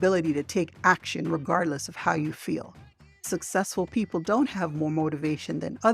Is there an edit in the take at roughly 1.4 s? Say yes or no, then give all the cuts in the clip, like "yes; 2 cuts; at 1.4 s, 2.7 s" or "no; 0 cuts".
no; 1 cut; at 3.2 s